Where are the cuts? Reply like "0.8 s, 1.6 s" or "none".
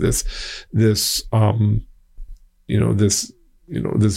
none